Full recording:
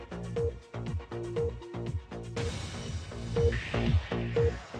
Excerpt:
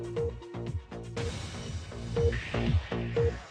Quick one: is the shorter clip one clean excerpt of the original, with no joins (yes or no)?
yes